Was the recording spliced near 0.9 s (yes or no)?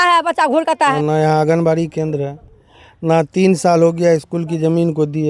yes